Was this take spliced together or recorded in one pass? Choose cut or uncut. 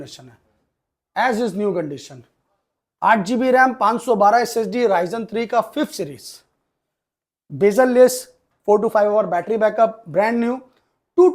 uncut